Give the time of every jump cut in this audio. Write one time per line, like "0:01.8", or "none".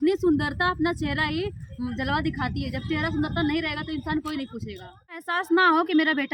0:05.3